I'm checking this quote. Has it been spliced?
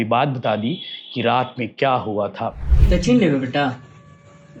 yes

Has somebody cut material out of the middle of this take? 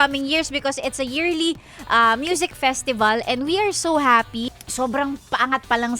yes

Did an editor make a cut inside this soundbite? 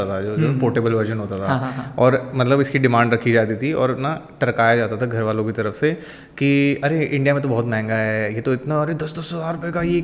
no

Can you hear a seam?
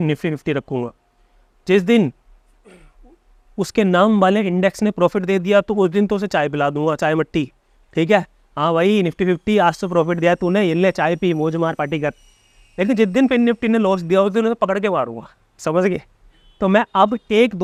no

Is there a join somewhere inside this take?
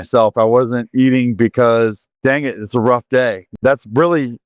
yes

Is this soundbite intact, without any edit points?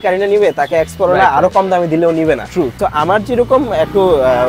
no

